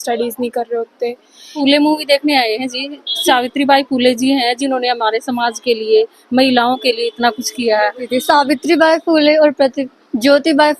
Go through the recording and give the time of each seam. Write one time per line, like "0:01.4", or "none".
0:01.6
0:08.1